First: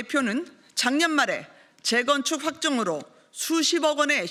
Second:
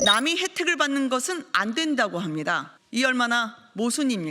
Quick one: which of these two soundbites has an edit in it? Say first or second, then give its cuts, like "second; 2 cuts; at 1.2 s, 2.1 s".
second; 1 cut; at 2.7 s